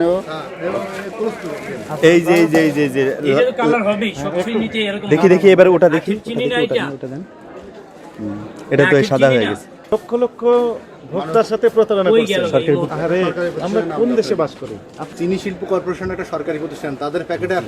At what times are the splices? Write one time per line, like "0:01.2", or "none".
0:09.9
0:12.9
0:15.1